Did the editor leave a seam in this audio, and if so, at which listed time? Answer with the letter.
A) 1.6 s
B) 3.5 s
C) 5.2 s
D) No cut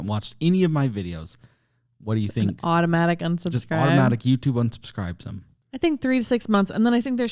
D